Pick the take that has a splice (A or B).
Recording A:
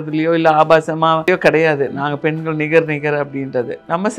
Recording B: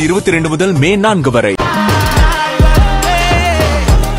A